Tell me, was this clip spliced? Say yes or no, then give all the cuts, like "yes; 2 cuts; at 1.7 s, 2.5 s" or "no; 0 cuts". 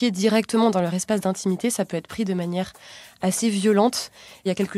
no; 0 cuts